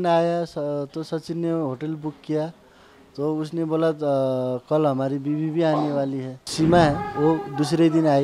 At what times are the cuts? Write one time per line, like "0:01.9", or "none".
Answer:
0:06.5